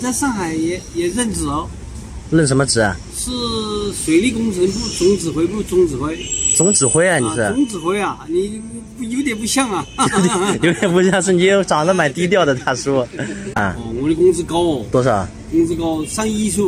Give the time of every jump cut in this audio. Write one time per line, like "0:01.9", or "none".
0:13.3